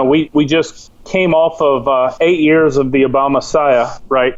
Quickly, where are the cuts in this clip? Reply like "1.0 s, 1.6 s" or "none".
none